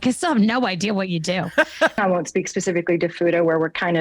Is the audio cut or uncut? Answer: cut